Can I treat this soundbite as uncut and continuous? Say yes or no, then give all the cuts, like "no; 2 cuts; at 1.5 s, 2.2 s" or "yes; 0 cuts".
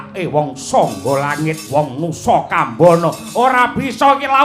no; 1 cut; at 1.6 s